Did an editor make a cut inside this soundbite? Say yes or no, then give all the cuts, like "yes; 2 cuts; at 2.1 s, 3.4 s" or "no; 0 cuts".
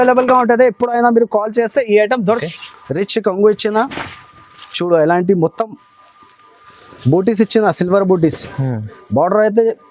yes; 1 cut; at 2.4 s